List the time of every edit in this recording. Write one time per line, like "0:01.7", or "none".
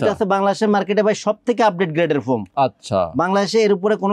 none